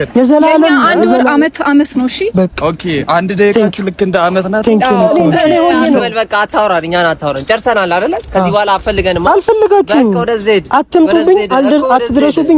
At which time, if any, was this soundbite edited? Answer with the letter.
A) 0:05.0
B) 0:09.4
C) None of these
A